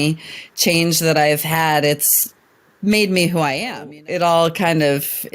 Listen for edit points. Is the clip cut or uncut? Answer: cut